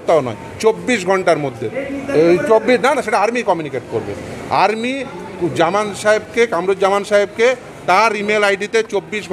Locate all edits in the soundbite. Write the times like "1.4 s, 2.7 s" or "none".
none